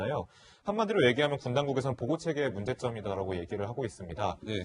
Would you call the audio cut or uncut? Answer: cut